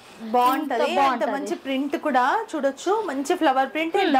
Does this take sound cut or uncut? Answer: uncut